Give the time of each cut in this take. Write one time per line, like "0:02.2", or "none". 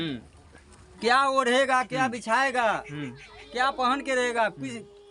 none